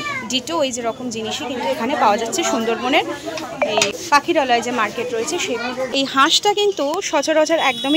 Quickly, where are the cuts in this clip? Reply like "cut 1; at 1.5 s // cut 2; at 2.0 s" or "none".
cut 1; at 3.7 s // cut 2; at 5.9 s